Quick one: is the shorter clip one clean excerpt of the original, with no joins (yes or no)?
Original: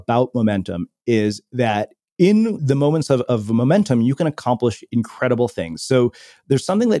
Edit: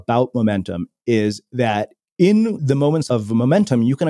no